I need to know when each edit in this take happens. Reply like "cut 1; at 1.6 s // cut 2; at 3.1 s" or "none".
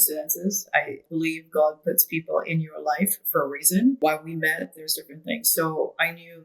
cut 1; at 1.0 s // cut 2; at 4.0 s